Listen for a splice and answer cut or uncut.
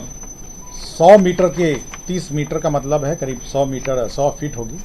uncut